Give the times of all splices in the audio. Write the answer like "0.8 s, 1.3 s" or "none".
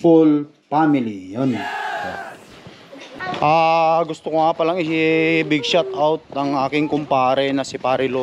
3.0 s